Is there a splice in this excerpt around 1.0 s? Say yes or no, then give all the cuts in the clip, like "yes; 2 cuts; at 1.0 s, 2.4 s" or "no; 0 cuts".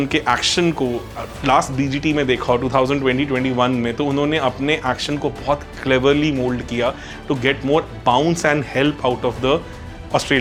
no; 0 cuts